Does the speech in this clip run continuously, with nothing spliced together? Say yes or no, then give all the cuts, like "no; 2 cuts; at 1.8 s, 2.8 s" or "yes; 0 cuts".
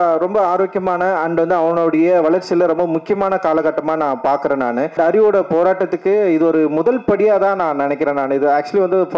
no; 1 cut; at 4.9 s